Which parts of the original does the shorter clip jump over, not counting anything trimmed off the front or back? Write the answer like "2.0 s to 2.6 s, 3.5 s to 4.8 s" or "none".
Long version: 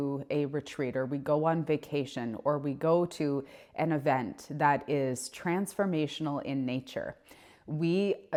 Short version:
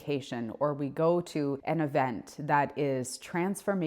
3.4 s to 3.7 s